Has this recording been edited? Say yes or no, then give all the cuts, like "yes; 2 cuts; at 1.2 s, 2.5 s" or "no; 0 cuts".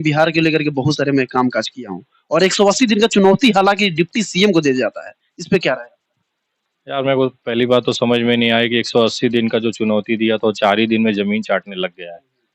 no; 0 cuts